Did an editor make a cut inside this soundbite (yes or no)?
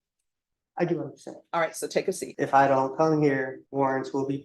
yes